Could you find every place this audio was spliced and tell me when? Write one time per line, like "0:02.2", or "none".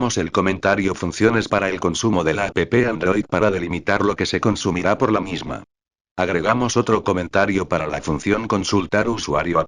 none